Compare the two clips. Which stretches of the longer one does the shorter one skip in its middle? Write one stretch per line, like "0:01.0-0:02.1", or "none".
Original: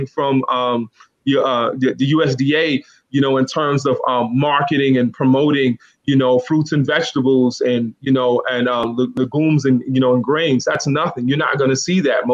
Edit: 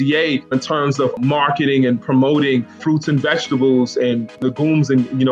0:03.4-0:04.1
0:05.9-0:06.5
0:08.0-0:09.1